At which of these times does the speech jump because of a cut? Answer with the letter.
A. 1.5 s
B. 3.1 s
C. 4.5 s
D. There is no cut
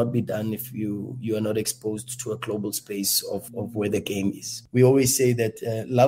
C